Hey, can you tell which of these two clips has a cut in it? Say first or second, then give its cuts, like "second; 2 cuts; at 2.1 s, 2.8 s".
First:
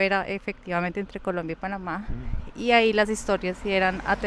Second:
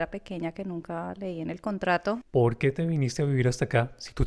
second; 1 cut; at 2.2 s